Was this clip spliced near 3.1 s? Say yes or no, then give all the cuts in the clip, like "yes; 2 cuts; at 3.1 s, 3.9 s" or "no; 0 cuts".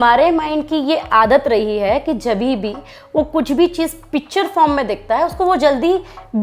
no; 0 cuts